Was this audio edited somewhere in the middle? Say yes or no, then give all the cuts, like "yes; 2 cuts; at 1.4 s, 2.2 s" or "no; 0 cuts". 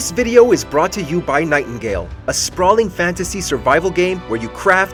no; 0 cuts